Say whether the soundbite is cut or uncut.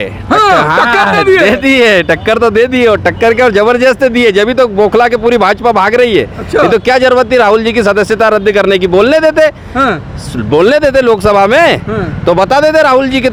uncut